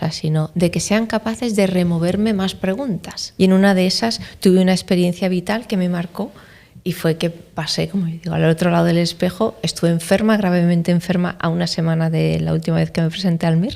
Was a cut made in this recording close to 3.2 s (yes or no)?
yes